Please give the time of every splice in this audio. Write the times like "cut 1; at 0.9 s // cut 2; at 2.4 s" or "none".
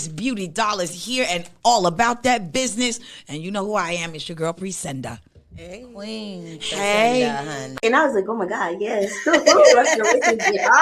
cut 1; at 7.8 s